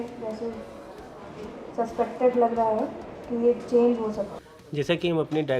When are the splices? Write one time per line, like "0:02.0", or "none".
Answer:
0:04.3